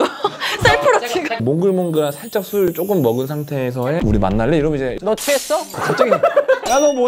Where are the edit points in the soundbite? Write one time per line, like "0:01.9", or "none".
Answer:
0:01.4
0:04.0